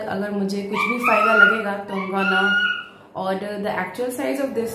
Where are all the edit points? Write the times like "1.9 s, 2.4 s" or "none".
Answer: none